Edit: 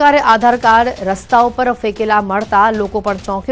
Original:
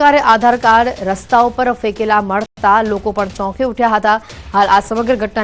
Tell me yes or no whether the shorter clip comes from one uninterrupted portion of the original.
no